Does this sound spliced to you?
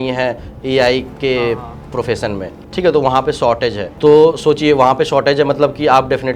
yes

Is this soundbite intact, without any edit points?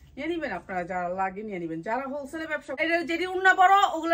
no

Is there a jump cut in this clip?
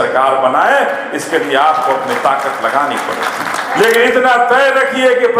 yes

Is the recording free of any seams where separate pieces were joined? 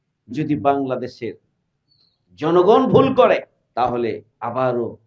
no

